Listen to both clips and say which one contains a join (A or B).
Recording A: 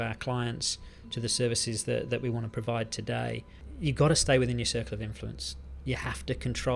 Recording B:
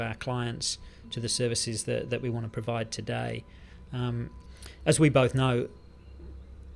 A